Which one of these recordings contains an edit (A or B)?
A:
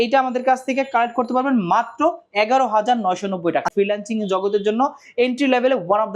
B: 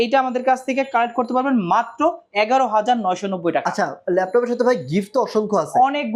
A